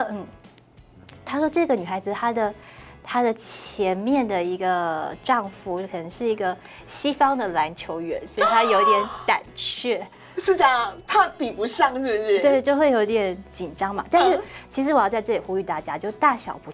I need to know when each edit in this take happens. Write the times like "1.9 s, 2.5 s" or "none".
none